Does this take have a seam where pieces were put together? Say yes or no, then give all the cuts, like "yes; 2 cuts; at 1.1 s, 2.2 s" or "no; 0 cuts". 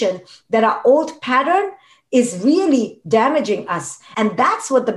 yes; 1 cut; at 4.0 s